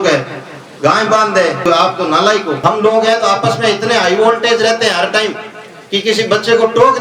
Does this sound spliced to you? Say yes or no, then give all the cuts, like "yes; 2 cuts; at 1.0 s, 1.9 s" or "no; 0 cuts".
yes; 2 cuts; at 1.6 s, 2.6 s